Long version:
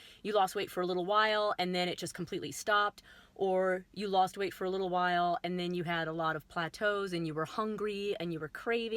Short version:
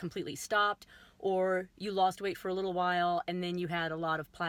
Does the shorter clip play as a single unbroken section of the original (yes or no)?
yes